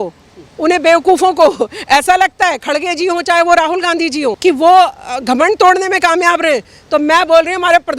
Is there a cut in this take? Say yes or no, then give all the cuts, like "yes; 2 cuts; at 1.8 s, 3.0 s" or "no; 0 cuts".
yes; 1 cut; at 4.4 s